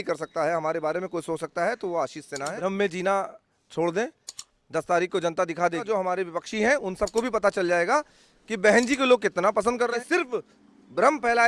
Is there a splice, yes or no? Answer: yes